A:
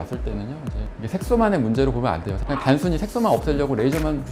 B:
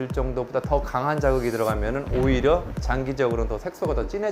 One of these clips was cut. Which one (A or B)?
A